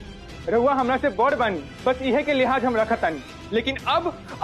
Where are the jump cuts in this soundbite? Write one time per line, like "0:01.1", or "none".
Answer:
0:01.7
0:03.3